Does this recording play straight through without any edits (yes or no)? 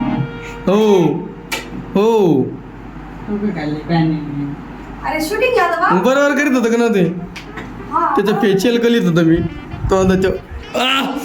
yes